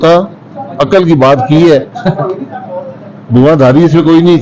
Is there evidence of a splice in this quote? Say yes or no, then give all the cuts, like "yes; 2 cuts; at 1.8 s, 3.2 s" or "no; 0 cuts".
no; 0 cuts